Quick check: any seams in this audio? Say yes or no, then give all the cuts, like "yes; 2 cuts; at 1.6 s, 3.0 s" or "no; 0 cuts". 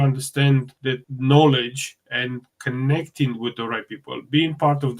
yes; 1 cut; at 1.1 s